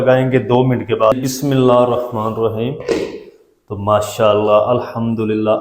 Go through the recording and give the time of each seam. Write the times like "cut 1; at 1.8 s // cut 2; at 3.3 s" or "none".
cut 1; at 1.2 s